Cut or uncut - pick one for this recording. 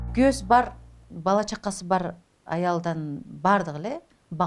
uncut